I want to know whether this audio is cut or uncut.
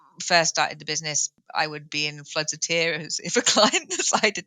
cut